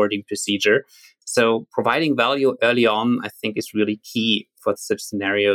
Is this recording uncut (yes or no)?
no